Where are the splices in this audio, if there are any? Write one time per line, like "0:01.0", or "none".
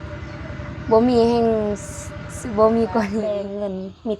0:03.2